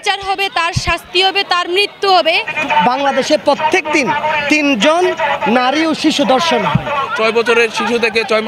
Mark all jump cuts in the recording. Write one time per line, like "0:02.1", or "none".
0:02.5
0:07.1